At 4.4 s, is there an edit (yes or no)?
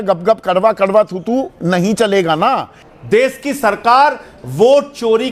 no